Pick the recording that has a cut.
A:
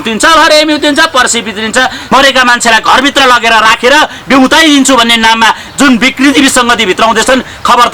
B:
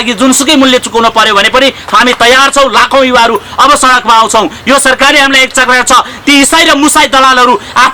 A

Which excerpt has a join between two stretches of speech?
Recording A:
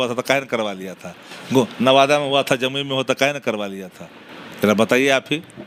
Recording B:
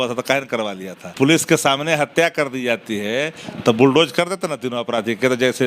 B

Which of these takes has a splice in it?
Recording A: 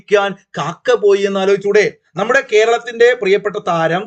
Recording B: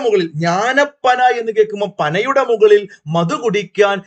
A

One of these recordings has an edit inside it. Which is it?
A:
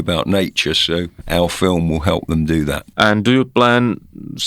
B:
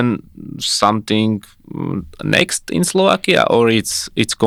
A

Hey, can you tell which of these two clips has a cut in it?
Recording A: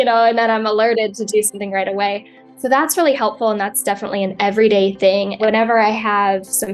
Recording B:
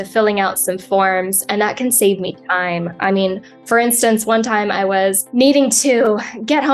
A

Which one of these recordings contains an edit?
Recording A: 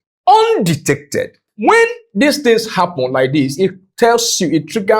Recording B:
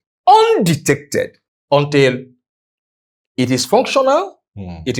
A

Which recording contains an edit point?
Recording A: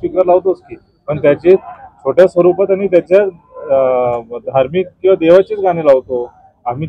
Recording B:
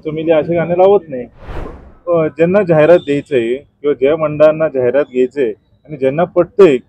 B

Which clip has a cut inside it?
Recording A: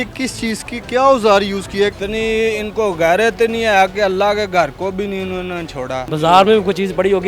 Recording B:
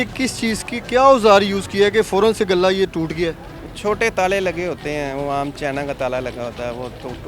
A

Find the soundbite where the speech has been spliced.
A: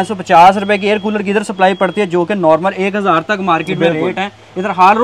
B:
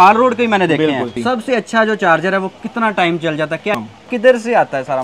B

